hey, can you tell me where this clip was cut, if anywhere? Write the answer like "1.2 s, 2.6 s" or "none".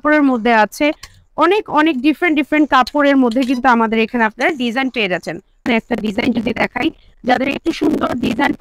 5.6 s